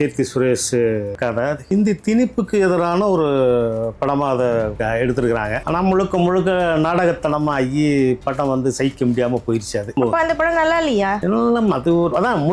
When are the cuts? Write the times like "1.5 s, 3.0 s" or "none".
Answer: 1.6 s, 4.8 s, 5.6 s, 10.0 s